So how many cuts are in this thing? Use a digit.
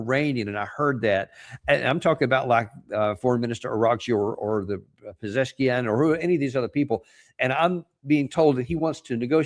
0